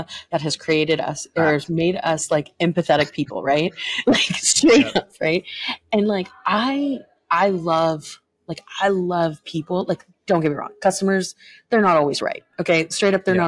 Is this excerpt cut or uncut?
uncut